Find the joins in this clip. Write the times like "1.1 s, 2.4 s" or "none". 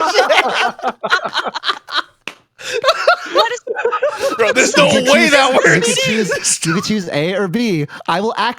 none